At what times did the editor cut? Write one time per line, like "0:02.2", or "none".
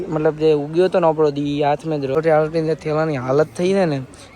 0:02.2